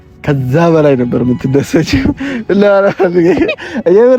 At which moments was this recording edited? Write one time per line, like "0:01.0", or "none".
none